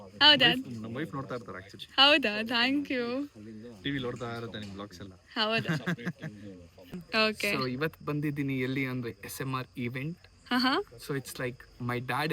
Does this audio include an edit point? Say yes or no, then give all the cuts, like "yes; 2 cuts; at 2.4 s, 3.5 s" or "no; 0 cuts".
yes; 1 cut; at 7.0 s